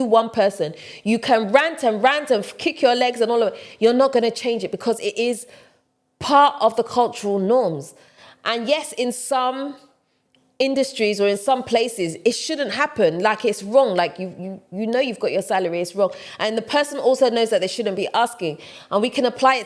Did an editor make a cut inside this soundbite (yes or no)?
no